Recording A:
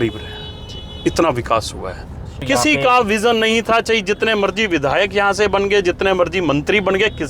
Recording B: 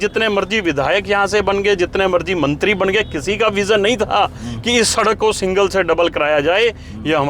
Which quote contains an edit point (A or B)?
A